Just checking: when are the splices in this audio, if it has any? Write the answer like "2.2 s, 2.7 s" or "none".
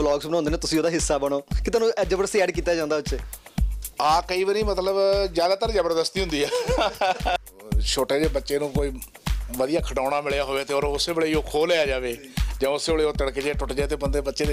7.4 s

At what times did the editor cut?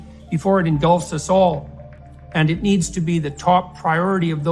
none

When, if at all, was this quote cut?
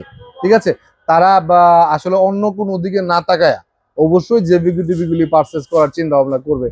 none

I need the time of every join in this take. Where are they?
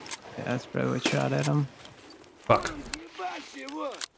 2.4 s

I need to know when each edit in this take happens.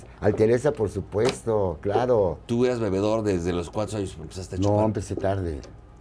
2.4 s

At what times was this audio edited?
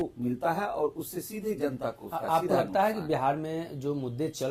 none

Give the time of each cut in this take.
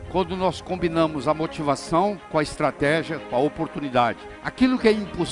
4.3 s

